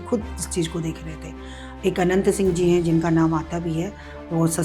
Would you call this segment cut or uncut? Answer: uncut